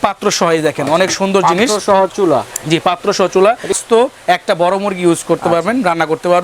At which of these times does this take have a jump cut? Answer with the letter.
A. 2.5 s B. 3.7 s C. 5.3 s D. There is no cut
B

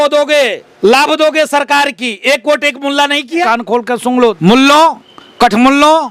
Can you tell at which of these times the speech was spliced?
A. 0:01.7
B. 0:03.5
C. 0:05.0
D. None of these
D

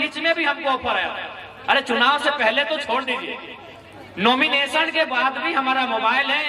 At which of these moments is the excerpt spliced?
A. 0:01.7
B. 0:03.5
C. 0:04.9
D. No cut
D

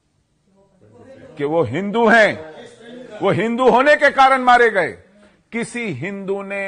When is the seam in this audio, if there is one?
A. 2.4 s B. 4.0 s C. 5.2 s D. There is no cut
D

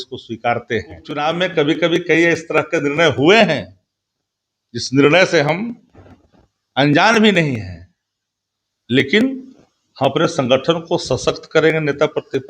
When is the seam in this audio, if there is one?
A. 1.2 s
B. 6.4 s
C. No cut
A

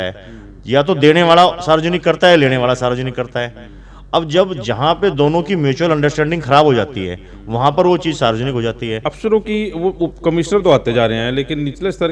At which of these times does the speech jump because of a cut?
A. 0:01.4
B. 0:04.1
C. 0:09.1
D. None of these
C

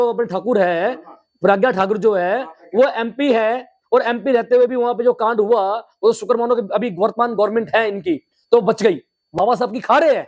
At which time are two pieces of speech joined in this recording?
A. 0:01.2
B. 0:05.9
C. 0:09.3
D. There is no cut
C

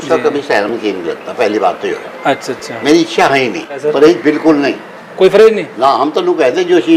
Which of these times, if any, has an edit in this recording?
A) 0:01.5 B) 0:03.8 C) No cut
B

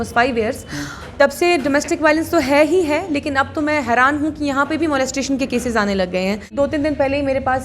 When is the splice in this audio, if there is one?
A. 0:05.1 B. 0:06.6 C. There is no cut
B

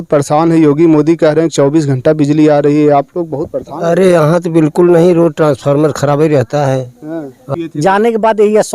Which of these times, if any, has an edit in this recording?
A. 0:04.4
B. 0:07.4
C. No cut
B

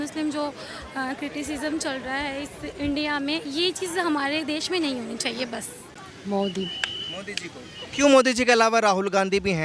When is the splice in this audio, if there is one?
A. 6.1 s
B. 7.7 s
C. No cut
A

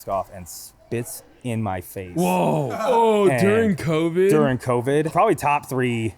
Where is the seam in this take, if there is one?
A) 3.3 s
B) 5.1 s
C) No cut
B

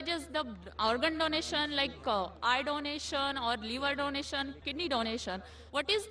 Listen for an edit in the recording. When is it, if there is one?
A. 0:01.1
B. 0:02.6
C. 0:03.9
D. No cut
B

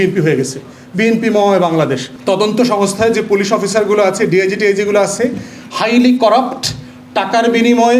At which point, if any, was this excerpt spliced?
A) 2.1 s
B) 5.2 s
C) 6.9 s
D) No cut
A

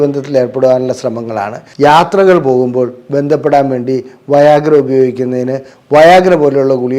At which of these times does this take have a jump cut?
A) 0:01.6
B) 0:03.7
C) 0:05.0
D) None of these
A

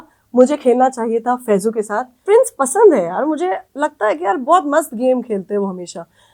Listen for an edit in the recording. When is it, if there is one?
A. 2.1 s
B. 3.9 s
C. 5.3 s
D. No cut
A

